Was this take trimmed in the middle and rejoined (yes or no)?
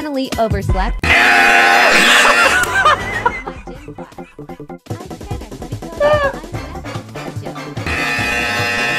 no